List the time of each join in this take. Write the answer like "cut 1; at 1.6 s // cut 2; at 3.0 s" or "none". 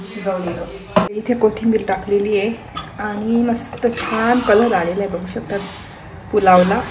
cut 1; at 1.1 s